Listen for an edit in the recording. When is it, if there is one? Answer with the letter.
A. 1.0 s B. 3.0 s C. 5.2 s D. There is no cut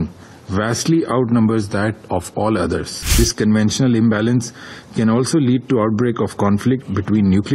B